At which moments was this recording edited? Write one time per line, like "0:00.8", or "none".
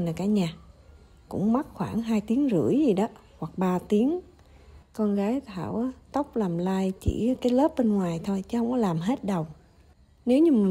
none

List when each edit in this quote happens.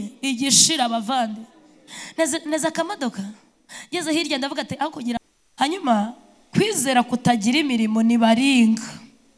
0:05.4

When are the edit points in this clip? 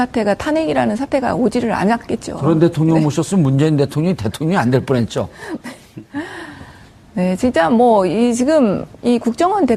0:04.8

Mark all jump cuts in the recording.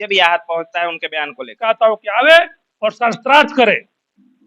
0:01.6

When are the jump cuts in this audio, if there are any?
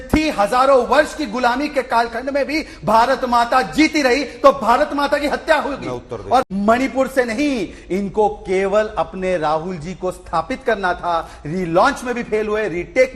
0:06.5

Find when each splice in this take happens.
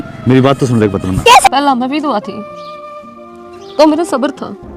0:01.5

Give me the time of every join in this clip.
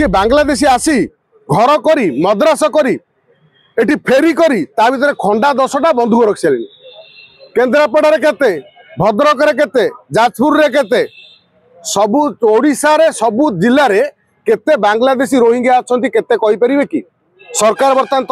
none

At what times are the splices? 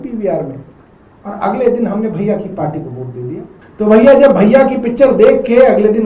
0:03.6

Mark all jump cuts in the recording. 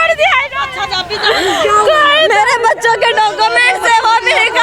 none

